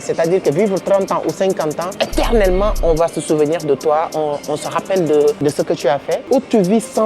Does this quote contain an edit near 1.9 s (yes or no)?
yes